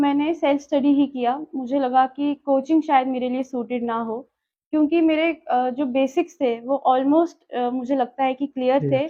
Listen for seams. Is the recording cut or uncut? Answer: uncut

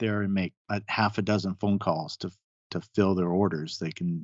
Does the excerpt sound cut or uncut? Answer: uncut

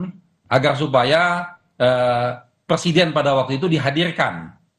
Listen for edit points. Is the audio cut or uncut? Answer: uncut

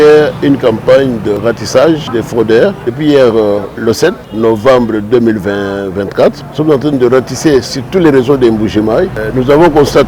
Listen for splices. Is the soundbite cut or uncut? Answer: cut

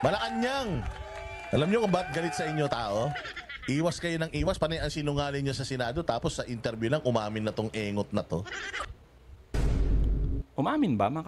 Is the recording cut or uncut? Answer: uncut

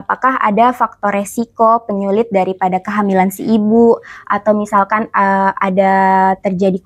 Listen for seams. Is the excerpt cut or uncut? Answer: uncut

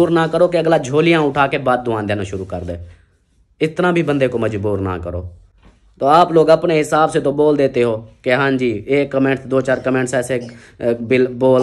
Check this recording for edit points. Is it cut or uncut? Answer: uncut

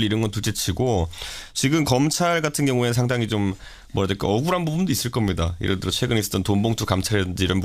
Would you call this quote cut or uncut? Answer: cut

